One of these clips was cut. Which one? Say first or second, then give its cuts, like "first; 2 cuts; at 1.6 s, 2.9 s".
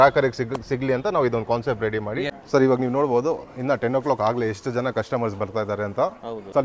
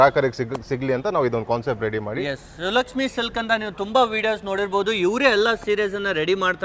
first; 1 cut; at 2.4 s